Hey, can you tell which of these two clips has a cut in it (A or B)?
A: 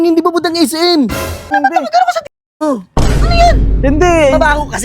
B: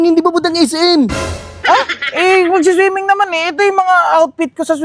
A